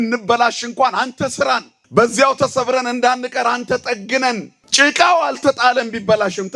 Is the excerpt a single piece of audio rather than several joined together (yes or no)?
no